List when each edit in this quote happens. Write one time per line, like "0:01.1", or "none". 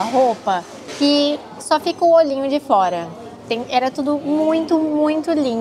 none